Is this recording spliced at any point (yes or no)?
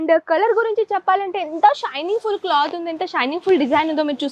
no